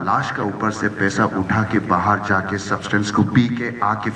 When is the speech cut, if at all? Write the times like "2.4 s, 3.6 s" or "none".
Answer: none